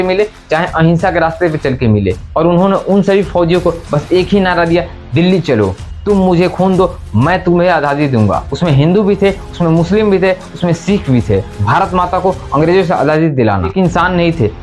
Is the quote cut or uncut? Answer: cut